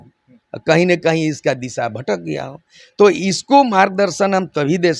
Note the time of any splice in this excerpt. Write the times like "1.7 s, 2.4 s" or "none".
none